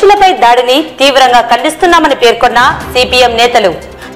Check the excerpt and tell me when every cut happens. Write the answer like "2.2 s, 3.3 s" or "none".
none